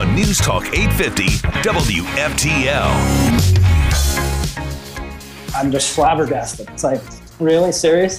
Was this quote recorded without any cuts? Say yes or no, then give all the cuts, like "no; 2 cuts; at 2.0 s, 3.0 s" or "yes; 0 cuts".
no; 1 cut; at 5.3 s